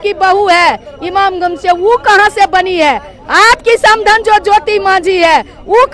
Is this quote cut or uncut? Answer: uncut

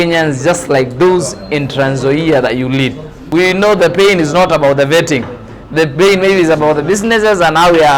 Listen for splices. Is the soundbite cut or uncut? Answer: cut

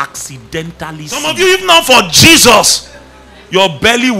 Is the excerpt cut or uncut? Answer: cut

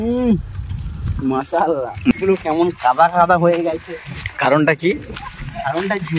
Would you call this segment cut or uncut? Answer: cut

